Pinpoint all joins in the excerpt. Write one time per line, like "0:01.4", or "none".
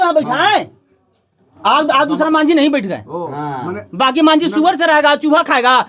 none